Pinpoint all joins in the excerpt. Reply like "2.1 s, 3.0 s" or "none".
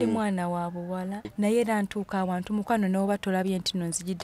1.3 s